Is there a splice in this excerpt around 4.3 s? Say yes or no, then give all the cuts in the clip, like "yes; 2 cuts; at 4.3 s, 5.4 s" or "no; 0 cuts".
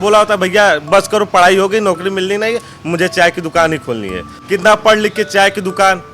yes; 1 cut; at 4.3 s